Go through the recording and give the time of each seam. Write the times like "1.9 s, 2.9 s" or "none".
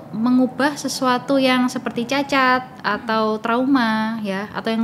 none